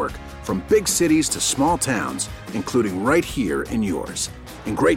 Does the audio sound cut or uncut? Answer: uncut